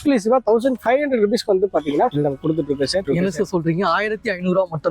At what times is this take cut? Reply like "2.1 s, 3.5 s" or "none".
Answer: 3.0 s